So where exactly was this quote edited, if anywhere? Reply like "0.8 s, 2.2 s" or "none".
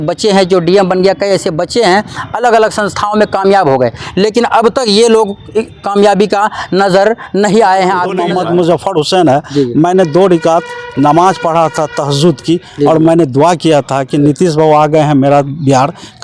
8.1 s